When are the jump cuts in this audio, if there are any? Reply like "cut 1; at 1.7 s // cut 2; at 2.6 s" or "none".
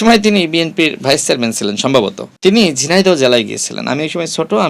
cut 1; at 2.2 s